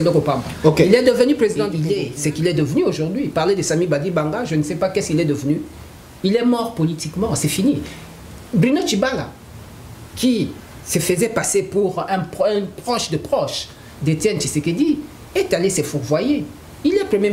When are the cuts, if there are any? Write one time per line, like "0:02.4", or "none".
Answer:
0:01.7